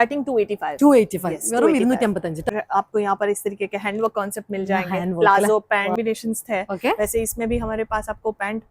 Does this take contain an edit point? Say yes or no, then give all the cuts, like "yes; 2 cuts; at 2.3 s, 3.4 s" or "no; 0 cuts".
yes; 2 cuts; at 2.5 s, 6.0 s